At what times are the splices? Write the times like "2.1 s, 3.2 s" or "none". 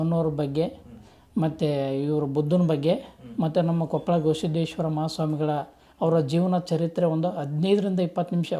none